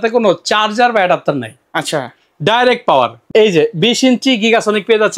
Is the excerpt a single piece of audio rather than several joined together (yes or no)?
no